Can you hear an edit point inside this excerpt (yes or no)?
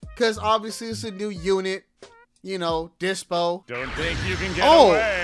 yes